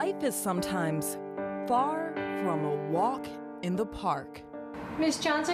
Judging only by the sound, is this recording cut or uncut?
uncut